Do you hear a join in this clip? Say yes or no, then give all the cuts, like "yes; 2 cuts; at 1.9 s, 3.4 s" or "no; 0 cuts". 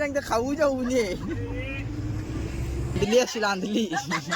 yes; 1 cut; at 3.0 s